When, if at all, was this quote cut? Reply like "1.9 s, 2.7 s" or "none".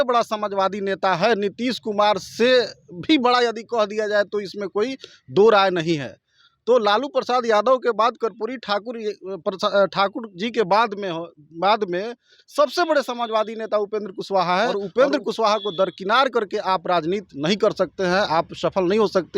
14.8 s

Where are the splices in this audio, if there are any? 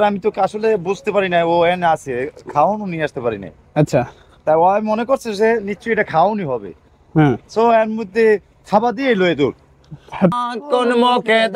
10.3 s

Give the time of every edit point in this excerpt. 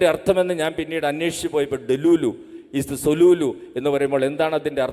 none

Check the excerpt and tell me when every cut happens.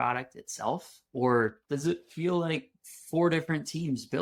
none

